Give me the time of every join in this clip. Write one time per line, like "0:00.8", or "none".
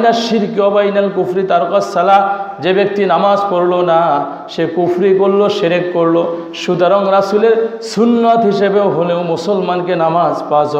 none